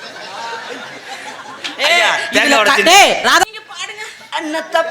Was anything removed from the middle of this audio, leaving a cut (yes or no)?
yes